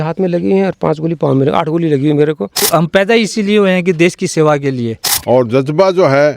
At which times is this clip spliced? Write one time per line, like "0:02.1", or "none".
0:02.6
0:05.1